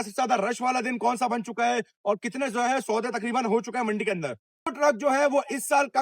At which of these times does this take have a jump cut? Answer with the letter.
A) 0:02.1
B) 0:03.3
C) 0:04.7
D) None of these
C